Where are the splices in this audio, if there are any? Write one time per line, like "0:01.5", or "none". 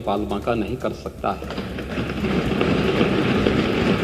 none